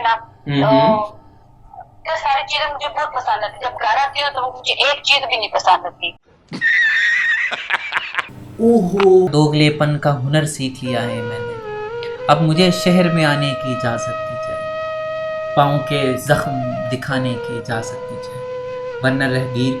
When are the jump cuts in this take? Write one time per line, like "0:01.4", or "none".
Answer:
0:09.3

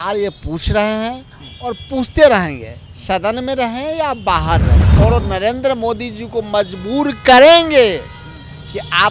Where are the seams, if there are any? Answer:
0:04.8

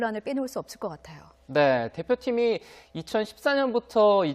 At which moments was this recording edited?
0:01.0

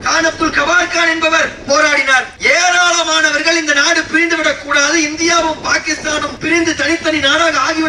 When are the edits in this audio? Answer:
0:02.3
0:06.3

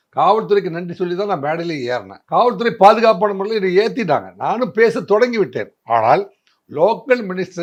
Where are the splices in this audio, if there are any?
none

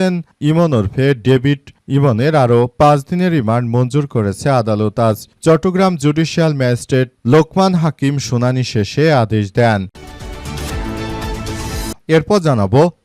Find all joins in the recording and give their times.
0:09.9
0:12.0

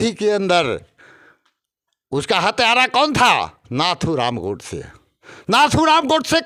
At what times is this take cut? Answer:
none

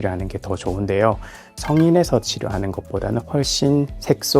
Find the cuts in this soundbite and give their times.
0:01.6

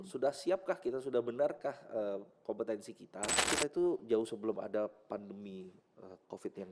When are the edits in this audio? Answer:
0:03.5

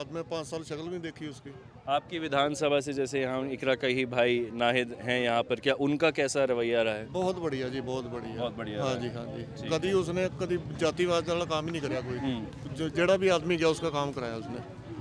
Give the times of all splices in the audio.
none

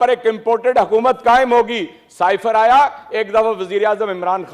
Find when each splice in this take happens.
none

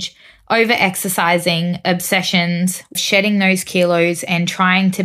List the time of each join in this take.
0:03.0

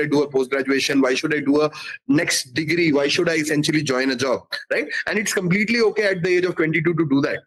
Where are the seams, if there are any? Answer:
none

